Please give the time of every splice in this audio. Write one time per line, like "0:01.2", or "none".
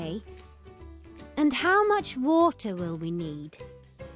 none